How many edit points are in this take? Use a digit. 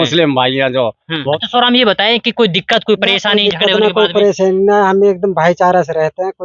1